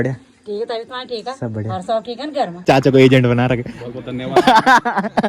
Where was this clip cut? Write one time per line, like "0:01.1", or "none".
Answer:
0:02.6